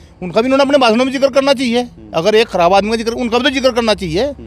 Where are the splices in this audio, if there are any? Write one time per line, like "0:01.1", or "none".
none

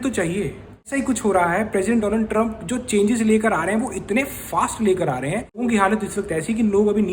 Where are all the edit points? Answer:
0:00.9
0:05.6

